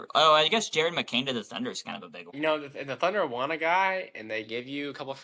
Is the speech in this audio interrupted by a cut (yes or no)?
yes